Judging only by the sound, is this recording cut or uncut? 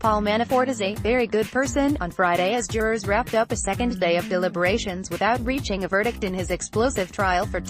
uncut